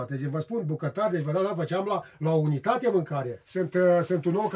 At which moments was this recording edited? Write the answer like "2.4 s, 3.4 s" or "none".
3.4 s